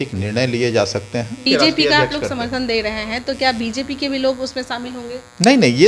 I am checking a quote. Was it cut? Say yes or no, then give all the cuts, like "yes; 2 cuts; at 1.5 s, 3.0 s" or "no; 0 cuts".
yes; 1 cut; at 1.4 s